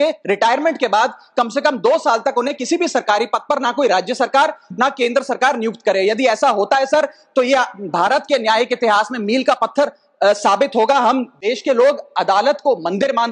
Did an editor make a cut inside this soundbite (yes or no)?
no